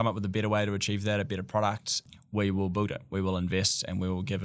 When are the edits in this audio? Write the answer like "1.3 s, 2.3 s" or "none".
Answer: 2.1 s